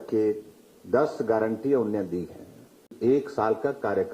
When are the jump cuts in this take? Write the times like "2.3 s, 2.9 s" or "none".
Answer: 2.9 s